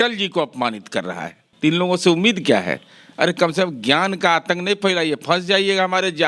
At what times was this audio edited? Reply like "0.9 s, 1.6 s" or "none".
1.4 s